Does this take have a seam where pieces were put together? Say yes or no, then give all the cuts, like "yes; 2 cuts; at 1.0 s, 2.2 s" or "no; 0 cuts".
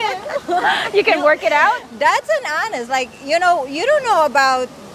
no; 0 cuts